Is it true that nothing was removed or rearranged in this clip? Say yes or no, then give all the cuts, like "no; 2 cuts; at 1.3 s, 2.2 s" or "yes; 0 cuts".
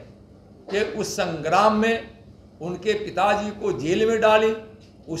yes; 0 cuts